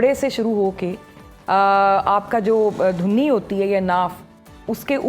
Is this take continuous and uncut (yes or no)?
yes